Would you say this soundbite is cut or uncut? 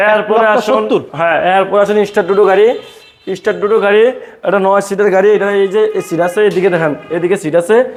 uncut